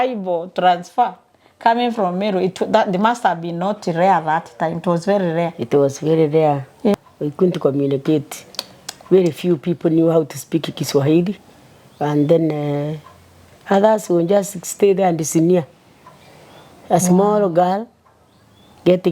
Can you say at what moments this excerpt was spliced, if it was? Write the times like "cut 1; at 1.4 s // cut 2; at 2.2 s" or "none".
cut 1; at 6.9 s